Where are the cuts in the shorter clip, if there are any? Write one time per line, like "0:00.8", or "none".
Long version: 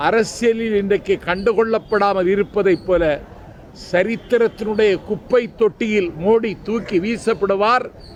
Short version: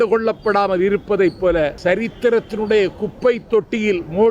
0:01.8